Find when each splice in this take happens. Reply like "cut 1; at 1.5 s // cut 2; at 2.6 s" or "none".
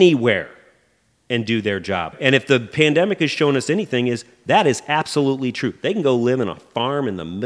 cut 1; at 2.1 s